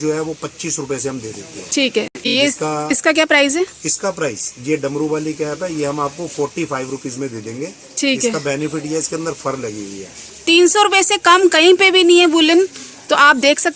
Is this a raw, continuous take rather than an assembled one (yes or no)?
yes